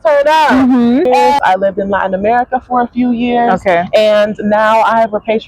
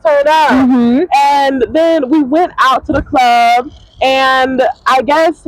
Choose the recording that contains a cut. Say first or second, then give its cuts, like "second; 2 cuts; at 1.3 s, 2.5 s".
first; 1 cut; at 1.4 s